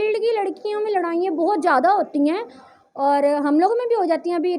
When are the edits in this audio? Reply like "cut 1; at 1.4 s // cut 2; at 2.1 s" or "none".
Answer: none

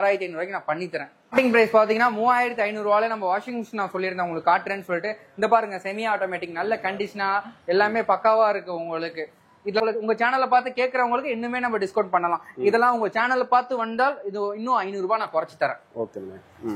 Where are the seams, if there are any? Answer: cut 1; at 1.3 s // cut 2; at 9.8 s

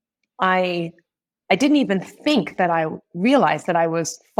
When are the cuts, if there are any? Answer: none

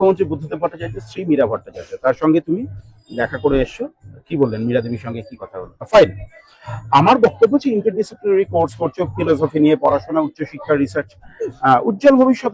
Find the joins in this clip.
cut 1; at 5.8 s

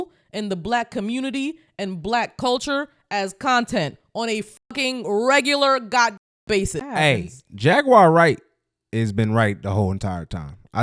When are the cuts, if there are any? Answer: cut 1; at 6.9 s

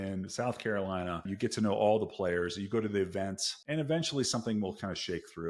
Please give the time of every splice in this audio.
cut 1; at 1.3 s // cut 2; at 3.5 s

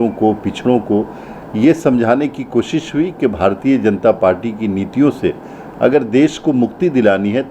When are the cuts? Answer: none

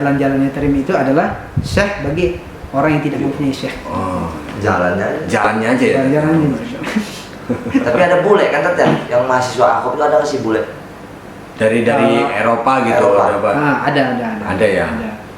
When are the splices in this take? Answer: none

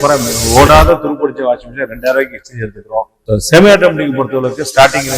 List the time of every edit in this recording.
cut 1; at 3.2 s

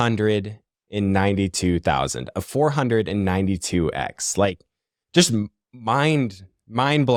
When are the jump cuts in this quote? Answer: none

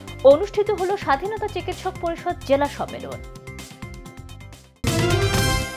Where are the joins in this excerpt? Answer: cut 1; at 4.9 s

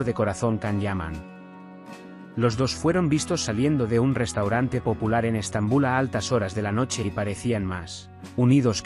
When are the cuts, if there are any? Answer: none

